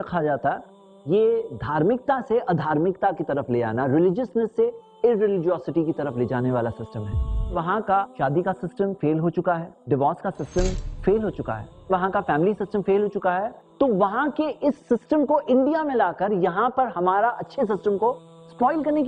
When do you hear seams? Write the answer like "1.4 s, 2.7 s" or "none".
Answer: 7.5 s